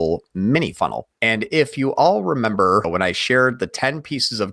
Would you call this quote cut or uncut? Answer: cut